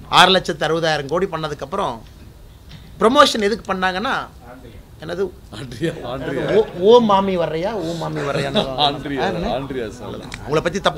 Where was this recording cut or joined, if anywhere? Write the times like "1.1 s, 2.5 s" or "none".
none